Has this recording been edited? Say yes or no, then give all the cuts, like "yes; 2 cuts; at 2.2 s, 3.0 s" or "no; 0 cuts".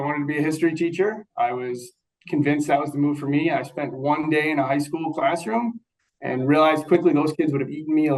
no; 0 cuts